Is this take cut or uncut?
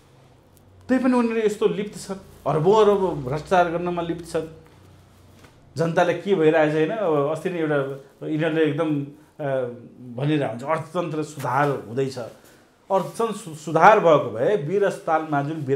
uncut